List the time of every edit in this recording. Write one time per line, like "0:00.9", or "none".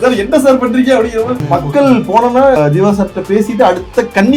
0:01.4
0:02.6